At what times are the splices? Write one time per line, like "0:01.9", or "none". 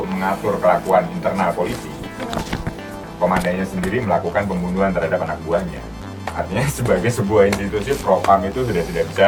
none